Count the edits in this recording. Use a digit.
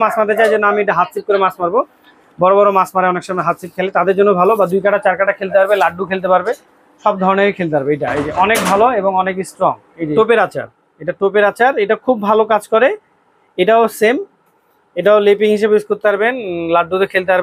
1